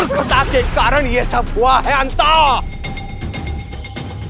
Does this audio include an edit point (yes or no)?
no